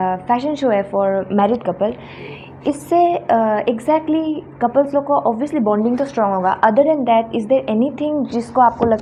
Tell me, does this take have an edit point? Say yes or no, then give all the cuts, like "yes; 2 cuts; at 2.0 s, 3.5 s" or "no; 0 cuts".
no; 0 cuts